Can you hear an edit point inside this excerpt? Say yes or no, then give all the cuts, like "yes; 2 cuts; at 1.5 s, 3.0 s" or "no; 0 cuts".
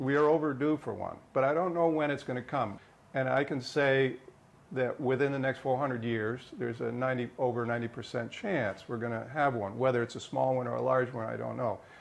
yes; 1 cut; at 2.8 s